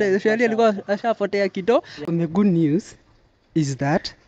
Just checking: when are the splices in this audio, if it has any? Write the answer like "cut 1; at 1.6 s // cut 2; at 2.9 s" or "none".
cut 1; at 1.9 s